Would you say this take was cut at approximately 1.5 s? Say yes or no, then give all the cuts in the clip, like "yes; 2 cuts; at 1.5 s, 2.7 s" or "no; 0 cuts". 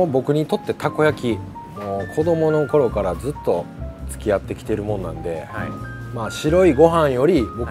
no; 0 cuts